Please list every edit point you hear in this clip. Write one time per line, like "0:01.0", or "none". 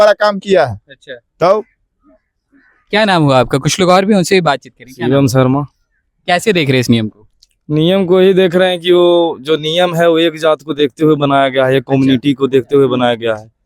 none